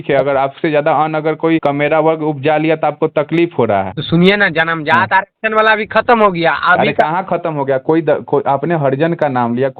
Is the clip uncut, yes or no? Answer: no